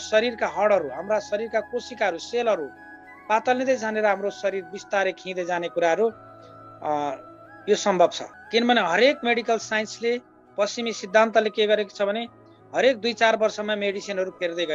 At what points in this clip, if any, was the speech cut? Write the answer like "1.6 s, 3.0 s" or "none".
8.3 s